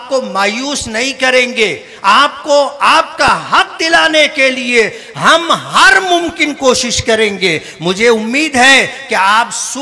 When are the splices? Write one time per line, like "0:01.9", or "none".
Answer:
none